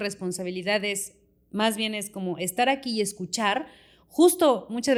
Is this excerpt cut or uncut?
uncut